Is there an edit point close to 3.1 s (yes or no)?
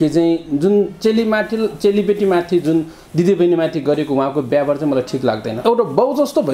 no